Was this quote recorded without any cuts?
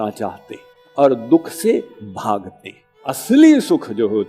no; 1 cut; at 3.0 s

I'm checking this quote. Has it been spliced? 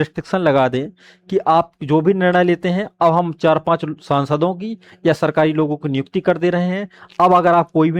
no; 0 cuts

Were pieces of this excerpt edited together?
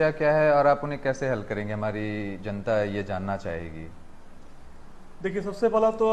no; 0 cuts

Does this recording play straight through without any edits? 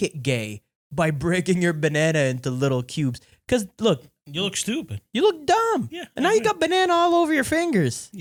yes; 0 cuts

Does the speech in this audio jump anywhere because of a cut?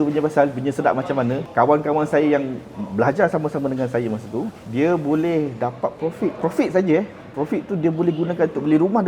yes; 3 cuts; at 1.4 s, 4.6 s, 6.4 s

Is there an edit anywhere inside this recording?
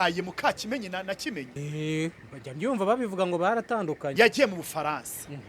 yes; 2 cuts; at 1.5 s, 4.1 s

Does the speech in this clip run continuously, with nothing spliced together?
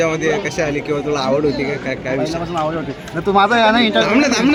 yes; 0 cuts

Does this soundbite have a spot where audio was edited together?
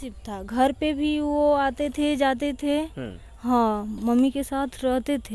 no; 0 cuts

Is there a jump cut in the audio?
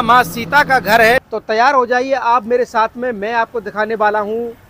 yes; 1 cut; at 1.1 s

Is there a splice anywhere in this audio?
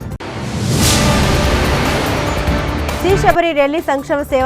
yes; 1 cut; at 2.8 s

